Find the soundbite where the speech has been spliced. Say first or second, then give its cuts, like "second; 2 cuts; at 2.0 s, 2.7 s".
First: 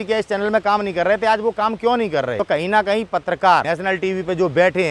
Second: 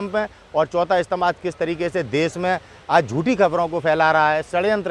first; 2 cuts; at 2.4 s, 3.6 s